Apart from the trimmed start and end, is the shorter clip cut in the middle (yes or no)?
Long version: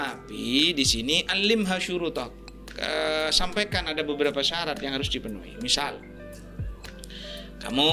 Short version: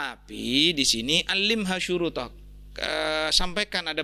no